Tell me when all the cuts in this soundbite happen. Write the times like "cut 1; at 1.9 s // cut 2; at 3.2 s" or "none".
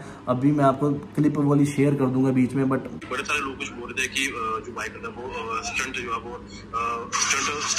cut 1; at 2.9 s